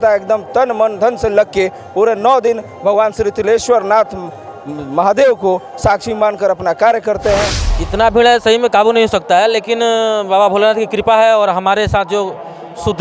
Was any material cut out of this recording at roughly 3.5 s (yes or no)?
no